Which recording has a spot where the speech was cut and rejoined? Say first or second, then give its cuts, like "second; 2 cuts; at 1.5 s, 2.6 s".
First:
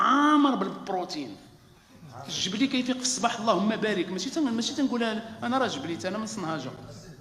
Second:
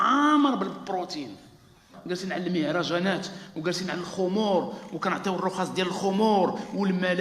second; 1 cut; at 1.9 s